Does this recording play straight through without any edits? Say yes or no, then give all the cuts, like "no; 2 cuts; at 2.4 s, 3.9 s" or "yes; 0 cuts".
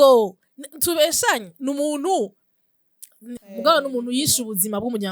no; 1 cut; at 3.4 s